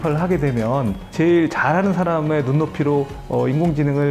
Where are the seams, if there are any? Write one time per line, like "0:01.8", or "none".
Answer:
none